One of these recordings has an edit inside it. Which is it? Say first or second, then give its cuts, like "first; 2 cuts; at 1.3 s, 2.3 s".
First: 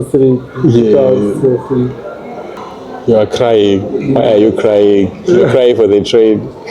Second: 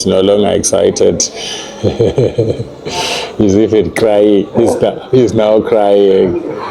first; 1 cut; at 2.6 s